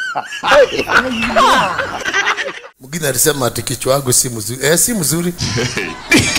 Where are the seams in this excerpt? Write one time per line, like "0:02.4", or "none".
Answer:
0:02.7

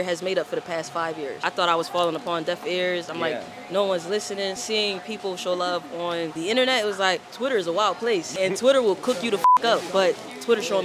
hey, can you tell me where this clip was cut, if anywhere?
0:01.5
0:04.6
0:06.3
0:07.3
0:08.3

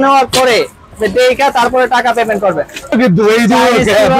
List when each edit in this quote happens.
0:02.9

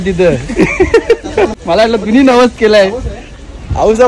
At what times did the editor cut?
0:01.5

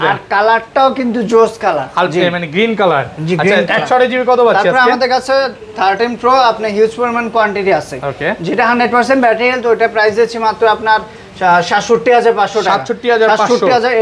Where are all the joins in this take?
none

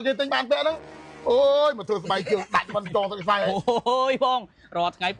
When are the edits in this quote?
0:03.5

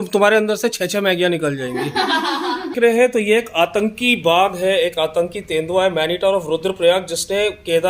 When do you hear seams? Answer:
0:02.7

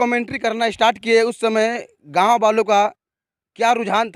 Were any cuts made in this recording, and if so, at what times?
none

